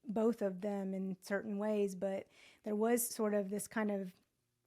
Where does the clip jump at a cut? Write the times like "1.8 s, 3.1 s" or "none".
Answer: 3.1 s